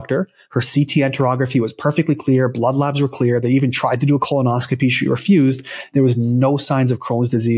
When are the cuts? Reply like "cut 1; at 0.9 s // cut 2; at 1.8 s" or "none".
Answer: none